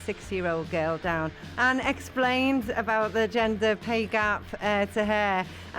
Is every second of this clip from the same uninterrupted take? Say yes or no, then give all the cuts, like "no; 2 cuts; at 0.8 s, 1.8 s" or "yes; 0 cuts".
no; 1 cut; at 1.4 s